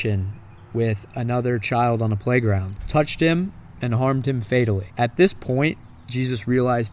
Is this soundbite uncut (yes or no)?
no